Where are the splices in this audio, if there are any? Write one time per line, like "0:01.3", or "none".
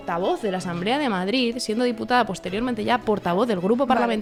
none

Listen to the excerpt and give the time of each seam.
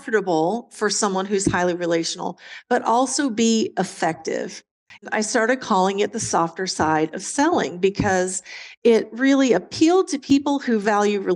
0:05.1
0:10.2

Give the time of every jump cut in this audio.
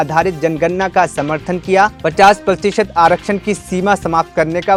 none

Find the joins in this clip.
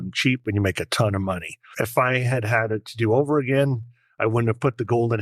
0:01.6

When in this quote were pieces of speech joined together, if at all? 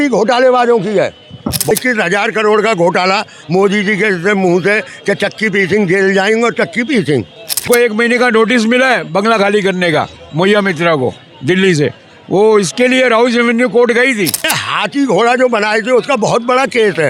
0:01.7
0:07.7
0:14.6

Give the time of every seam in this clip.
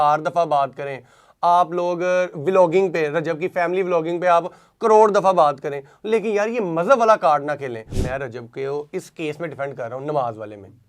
0:07.9

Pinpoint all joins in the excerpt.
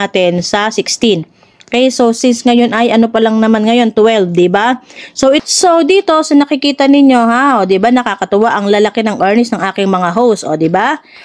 0:05.4

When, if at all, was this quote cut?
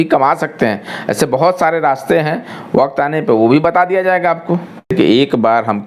0:04.7

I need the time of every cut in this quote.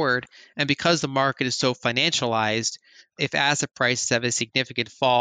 0:03.2

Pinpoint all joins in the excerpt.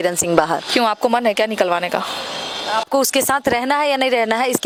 none

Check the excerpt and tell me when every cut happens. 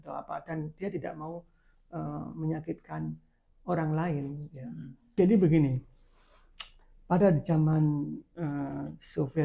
0:05.1

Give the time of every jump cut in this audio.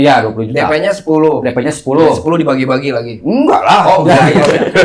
none

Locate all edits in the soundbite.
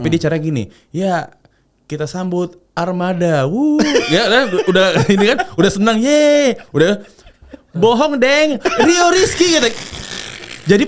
none

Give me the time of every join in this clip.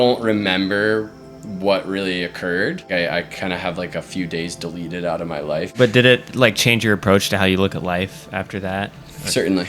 0:02.9
0:05.7

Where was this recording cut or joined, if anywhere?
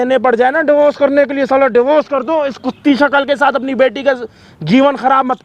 none

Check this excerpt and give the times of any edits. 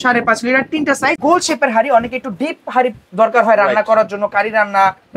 0:01.2

